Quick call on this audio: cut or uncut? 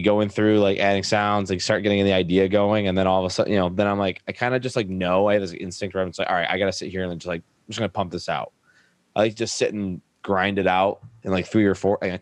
cut